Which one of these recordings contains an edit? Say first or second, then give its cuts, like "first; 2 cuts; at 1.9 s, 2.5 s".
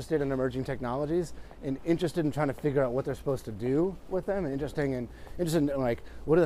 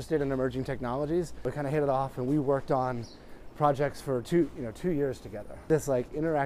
second; 2 cuts; at 1.5 s, 5.7 s